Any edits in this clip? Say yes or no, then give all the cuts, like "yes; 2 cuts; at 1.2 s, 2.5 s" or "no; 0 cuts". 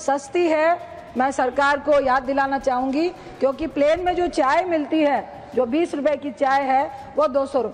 no; 0 cuts